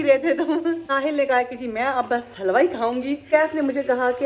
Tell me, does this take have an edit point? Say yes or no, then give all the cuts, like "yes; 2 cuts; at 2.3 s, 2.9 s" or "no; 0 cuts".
yes; 2 cuts; at 0.8 s, 3.3 s